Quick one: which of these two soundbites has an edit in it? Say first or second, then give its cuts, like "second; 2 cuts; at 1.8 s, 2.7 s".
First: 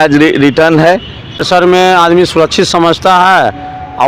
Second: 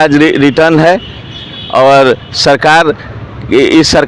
first; 1 cut; at 1.5 s